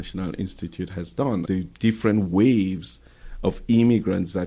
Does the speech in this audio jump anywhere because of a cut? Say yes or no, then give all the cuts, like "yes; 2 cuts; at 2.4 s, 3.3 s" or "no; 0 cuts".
yes; 1 cut; at 1.4 s